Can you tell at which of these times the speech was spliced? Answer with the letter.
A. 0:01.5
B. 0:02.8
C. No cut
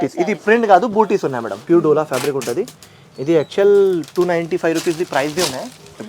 A